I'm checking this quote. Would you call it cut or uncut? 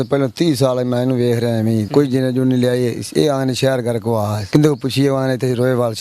cut